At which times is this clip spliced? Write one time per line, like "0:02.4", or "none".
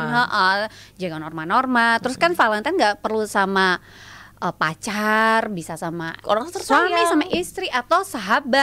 none